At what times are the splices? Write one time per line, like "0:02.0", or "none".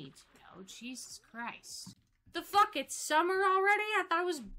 0:02.0